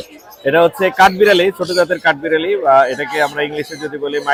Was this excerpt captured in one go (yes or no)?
yes